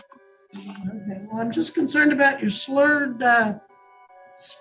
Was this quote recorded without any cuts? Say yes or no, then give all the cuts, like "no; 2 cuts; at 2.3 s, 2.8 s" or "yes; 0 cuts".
yes; 0 cuts